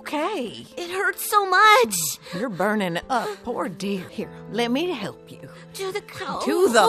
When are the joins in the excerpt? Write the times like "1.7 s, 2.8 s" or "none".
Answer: 4.1 s